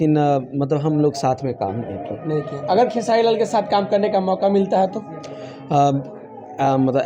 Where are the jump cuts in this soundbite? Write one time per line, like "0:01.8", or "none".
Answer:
none